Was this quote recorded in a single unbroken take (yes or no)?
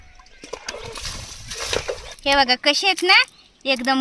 no